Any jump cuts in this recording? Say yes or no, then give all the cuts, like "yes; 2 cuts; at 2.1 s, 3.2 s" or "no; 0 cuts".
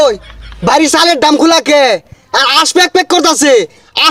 no; 0 cuts